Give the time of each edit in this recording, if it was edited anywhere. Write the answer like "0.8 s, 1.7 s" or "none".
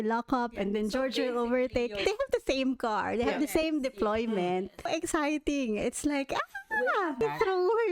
2.0 s, 4.9 s, 7.2 s